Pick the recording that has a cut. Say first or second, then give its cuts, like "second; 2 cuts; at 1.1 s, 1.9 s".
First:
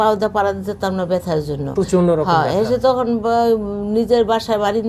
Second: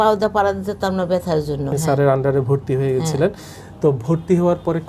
second; 1 cut; at 1.7 s